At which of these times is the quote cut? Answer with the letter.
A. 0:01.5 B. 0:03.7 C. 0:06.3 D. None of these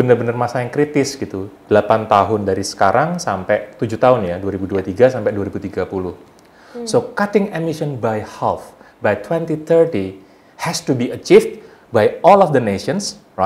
C